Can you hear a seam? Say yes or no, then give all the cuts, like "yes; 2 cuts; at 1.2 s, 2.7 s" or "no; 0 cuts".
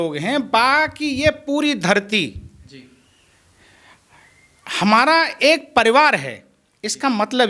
no; 0 cuts